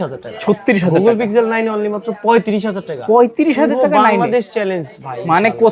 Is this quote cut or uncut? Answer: uncut